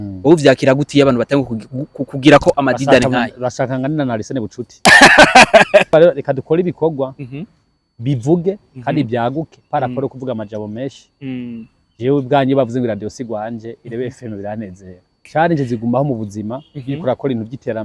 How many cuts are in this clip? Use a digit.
2